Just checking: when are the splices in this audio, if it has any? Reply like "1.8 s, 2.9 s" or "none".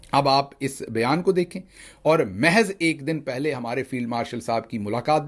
none

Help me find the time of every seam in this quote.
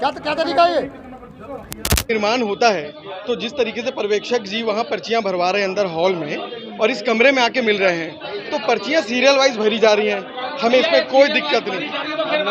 2.1 s

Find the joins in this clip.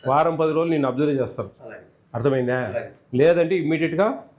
none

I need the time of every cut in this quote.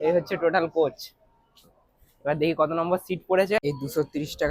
3.6 s

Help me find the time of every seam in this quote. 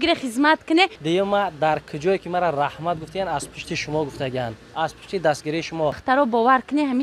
1.0 s, 6.0 s

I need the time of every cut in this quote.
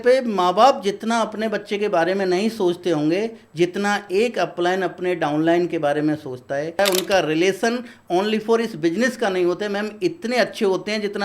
6.8 s

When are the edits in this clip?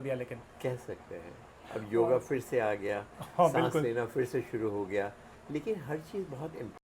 none

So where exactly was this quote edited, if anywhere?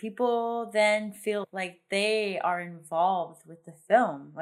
1.4 s

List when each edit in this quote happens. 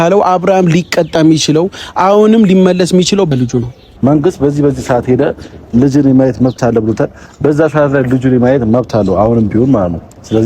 3.4 s

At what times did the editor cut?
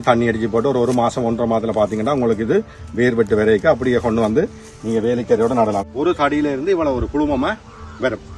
5.9 s

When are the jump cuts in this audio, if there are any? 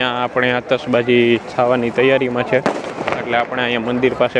none

